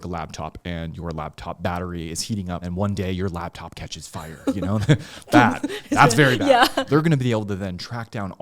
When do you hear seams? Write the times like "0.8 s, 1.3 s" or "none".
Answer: 2.7 s, 6.8 s